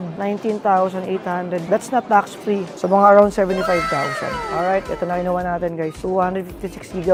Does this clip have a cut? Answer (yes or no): no